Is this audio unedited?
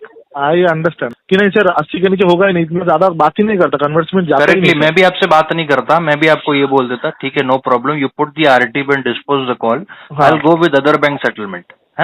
no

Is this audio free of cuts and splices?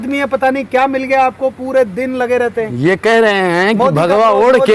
yes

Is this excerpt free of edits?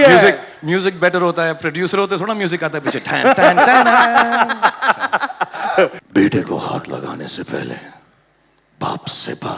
no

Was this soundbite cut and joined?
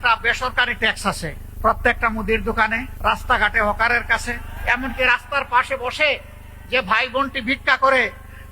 yes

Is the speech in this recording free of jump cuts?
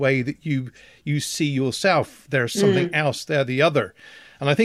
yes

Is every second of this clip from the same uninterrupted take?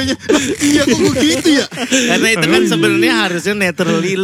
yes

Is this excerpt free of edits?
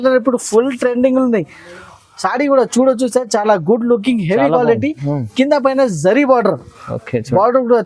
yes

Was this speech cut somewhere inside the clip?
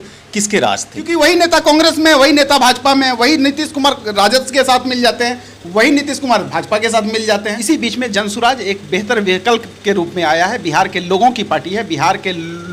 yes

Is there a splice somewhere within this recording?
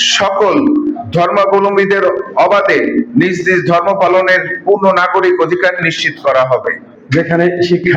yes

